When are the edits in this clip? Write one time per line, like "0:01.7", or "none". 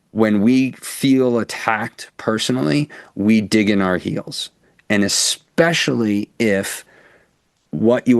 none